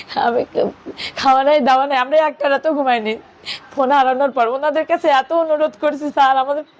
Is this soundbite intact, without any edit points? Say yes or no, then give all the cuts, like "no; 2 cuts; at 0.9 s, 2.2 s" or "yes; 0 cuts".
yes; 0 cuts